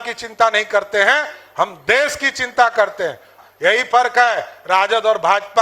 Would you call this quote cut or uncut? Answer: cut